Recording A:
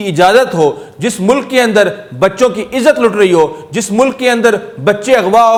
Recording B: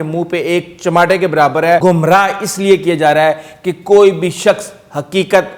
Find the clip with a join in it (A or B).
B